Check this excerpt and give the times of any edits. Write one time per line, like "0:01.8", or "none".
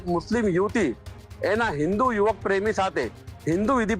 none